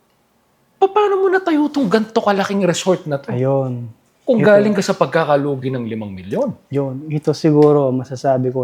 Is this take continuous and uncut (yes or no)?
yes